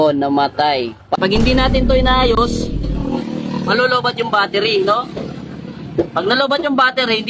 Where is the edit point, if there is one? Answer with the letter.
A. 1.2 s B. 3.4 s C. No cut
A